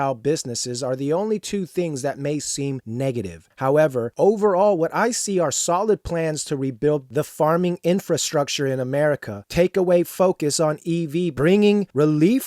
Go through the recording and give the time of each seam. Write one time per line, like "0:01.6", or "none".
0:11.3